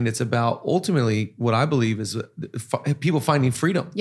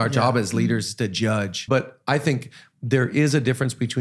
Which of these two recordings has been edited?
second; 1 cut; at 1.6 s

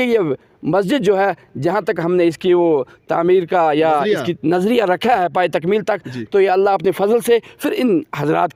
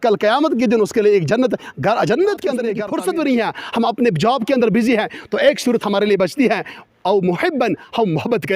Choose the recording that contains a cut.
second; 1 cut; at 2.9 s

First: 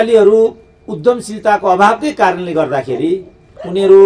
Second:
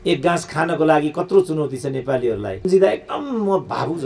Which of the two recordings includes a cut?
second; 1 cut; at 2.7 s

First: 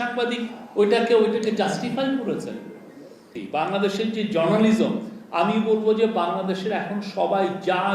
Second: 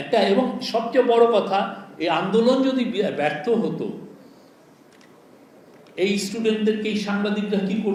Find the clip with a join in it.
first; 1 cut; at 3.4 s

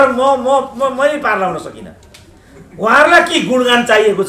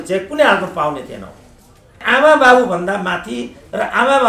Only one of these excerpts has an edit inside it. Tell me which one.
second; 1 cut; at 2.0 s

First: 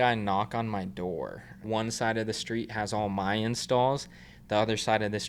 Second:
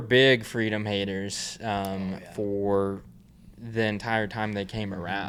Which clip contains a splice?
first; 1 cut; at 1.6 s

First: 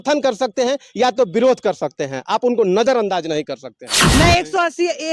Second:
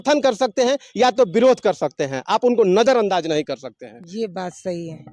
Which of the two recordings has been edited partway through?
first; 1 cut; at 3.9 s

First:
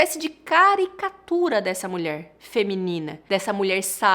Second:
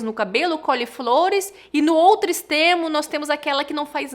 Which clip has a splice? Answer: first; 1 cut; at 3.1 s

